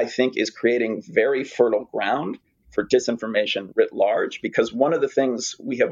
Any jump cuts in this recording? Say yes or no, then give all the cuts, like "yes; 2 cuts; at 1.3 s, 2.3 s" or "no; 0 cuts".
no; 0 cuts